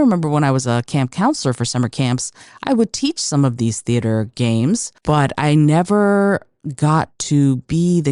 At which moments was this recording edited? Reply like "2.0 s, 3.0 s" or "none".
4.9 s